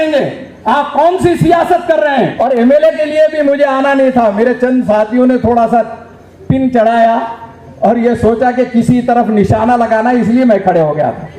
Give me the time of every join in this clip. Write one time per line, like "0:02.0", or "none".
0:02.3